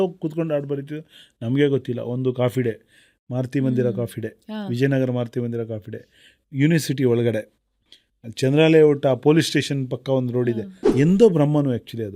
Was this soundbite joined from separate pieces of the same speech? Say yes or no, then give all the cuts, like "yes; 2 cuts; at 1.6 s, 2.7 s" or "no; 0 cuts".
yes; 1 cut; at 10.8 s